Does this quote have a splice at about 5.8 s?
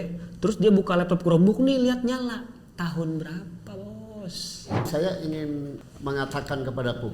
yes; 2 cuts; at 4.9 s, 5.8 s

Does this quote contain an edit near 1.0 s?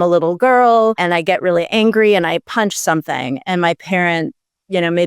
yes; 1 cut; at 1.0 s

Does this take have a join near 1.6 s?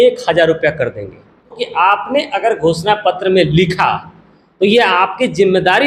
yes; 1 cut; at 1.6 s

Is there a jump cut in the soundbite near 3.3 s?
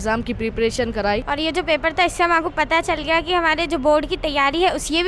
no; 1 cut; at 1.3 s

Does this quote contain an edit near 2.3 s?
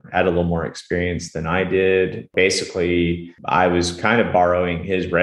yes; 2 cuts; at 2.3 s, 3.3 s

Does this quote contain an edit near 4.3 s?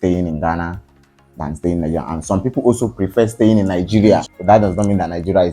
yes; 1 cut; at 4.3 s

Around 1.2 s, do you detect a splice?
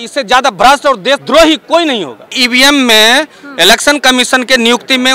yes; 2 cuts; at 1.2 s, 2.4 s

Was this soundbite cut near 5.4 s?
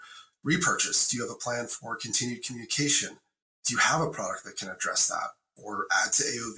yes; 1 cut; at 5.4 s

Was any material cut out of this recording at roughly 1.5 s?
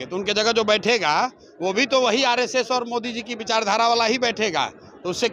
no; 0 cuts

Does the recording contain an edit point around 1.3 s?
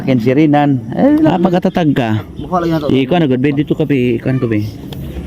yes; 1 cut; at 1.3 s

